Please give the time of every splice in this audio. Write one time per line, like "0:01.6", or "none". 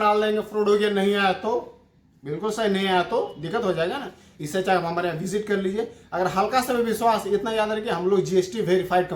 none